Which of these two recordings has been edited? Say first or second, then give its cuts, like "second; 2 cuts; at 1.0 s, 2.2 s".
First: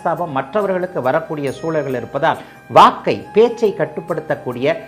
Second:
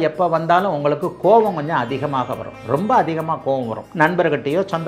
second; 1 cut; at 3.8 s